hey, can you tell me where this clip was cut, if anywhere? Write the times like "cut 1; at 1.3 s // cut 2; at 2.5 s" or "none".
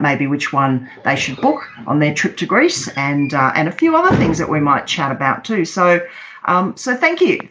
none